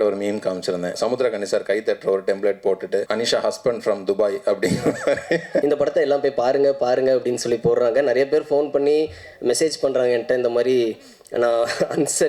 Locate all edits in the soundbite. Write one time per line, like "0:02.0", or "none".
0:01.0
0:03.1
0:05.6